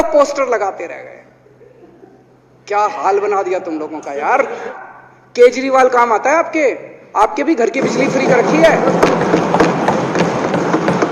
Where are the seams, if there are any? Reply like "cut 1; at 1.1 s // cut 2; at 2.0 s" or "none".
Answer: cut 1; at 4.7 s